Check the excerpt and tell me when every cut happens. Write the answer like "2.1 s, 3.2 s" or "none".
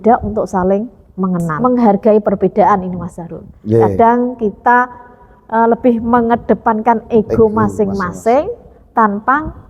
1.5 s